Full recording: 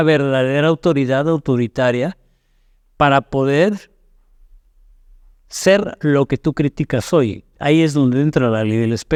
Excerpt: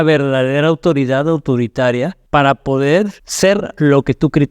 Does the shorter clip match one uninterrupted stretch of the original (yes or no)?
no